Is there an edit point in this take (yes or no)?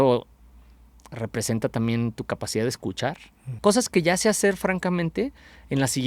yes